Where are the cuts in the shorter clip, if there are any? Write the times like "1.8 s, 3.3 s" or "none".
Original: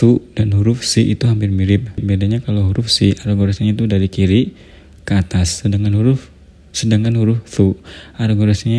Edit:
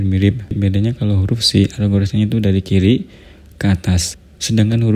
4.1 s